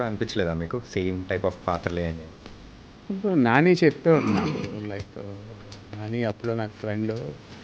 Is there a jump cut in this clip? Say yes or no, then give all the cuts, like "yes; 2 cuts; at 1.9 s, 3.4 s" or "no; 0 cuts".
no; 0 cuts